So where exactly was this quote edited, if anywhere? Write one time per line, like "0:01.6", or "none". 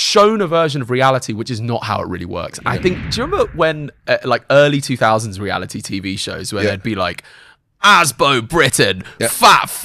0:03.1